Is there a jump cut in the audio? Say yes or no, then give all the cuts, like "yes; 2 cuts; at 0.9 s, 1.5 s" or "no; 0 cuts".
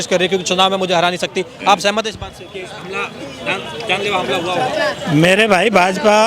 no; 0 cuts